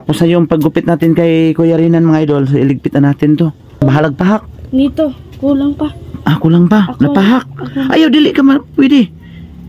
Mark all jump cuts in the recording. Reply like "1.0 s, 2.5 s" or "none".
3.8 s